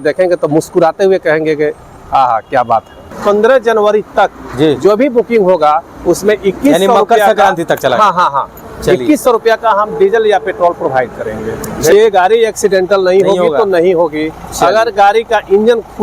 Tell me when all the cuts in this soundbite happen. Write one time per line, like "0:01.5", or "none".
0:03.2
0:11.9